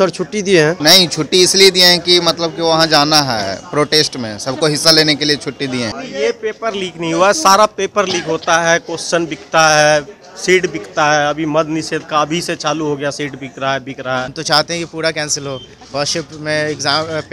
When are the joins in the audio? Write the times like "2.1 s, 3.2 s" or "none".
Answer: 0.8 s, 5.9 s, 14.3 s